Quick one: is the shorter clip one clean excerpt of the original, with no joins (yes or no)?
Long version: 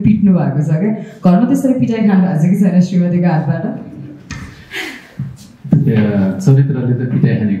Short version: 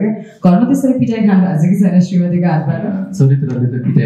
no